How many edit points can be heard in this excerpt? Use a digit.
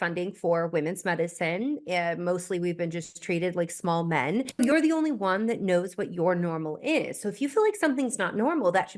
1